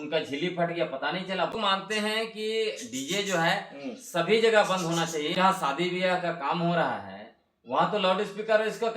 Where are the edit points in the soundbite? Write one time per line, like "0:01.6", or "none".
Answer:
0:01.5
0:05.3

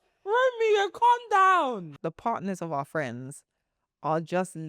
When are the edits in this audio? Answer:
0:01.9

